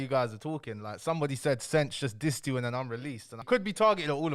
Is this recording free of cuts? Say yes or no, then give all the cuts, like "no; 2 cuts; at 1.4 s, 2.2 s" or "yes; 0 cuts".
no; 1 cut; at 3.4 s